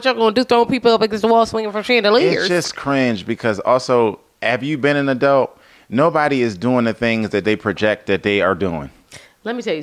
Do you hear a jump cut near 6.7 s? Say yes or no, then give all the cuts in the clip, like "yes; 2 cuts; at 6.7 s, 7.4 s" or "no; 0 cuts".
no; 0 cuts